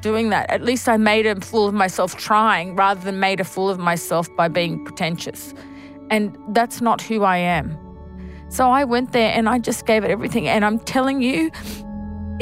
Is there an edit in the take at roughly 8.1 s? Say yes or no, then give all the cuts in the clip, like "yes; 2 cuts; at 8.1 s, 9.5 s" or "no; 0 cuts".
yes; 1 cut; at 8.1 s